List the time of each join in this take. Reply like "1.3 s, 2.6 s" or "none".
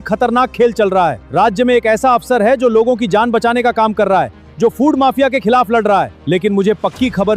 1.2 s, 6.2 s